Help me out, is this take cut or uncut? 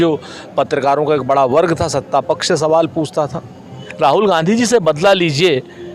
cut